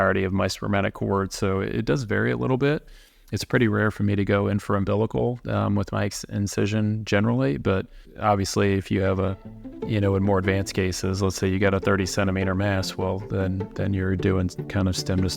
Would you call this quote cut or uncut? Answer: uncut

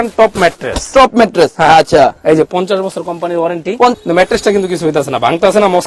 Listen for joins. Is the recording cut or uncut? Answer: cut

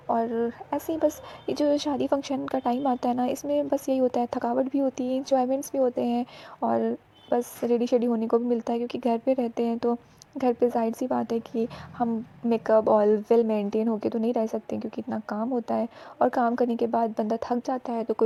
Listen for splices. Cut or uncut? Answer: uncut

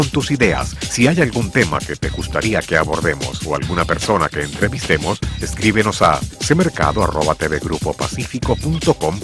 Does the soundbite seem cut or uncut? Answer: uncut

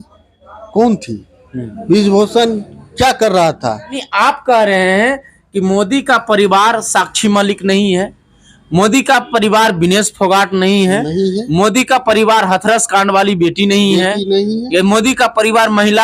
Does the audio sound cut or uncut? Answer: cut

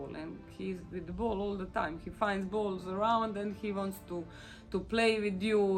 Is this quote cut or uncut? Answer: uncut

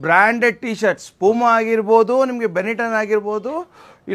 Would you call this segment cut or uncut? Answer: uncut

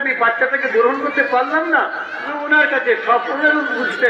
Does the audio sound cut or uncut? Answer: cut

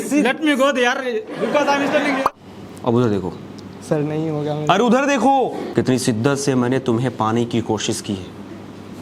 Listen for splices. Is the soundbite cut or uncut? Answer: cut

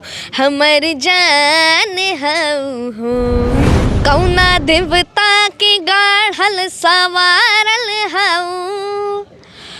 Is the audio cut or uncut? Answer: cut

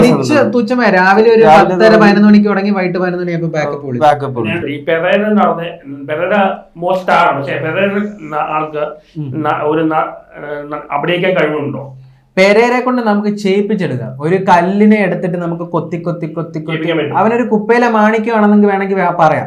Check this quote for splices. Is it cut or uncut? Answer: cut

